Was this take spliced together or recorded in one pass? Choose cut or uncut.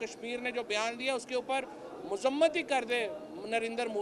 uncut